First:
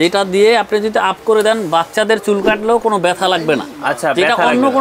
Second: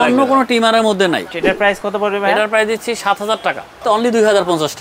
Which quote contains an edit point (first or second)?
second